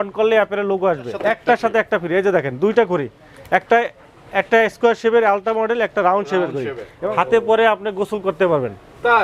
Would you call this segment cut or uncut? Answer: cut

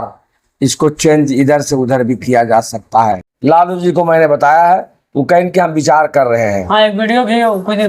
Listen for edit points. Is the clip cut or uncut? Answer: cut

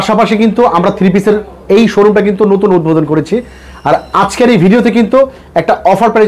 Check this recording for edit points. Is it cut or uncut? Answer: uncut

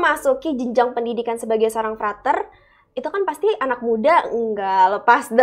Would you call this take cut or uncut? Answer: uncut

